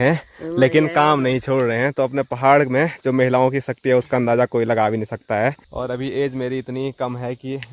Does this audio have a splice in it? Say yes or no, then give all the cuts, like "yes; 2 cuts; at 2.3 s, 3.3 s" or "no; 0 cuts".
yes; 1 cut; at 5.7 s